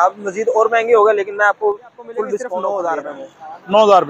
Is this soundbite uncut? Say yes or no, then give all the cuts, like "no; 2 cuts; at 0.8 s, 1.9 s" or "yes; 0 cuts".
no; 1 cut; at 2.5 s